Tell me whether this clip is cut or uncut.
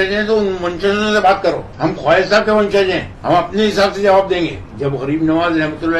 cut